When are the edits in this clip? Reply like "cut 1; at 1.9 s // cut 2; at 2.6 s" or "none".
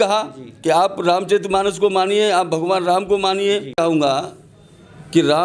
cut 1; at 3.8 s